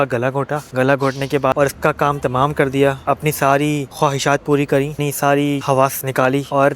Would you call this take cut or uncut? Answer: cut